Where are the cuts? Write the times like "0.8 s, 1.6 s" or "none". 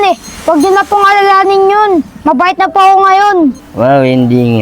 3.7 s